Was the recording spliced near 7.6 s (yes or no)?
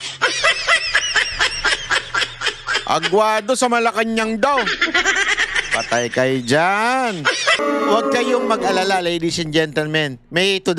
yes